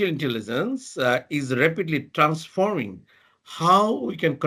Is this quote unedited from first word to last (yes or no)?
yes